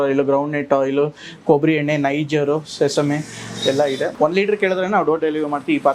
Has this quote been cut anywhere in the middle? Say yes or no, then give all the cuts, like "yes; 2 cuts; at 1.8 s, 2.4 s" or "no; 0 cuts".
yes; 1 cut; at 4.1 s